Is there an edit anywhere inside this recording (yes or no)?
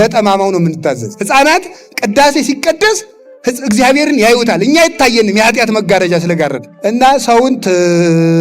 yes